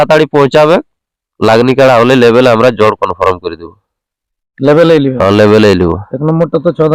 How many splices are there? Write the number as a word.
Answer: zero